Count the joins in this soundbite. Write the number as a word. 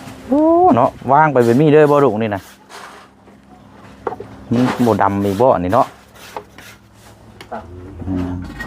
one